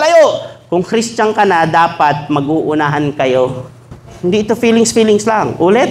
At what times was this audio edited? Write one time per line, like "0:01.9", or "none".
0:04.1